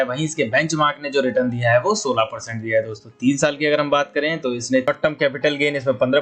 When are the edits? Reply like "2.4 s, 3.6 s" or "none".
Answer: 4.9 s